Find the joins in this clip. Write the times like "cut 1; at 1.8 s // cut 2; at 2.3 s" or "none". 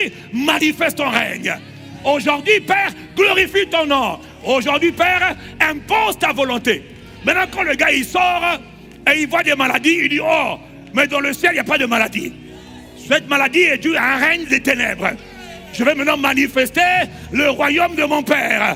none